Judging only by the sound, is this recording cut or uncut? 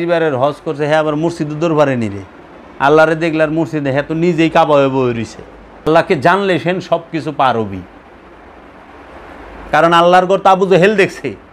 cut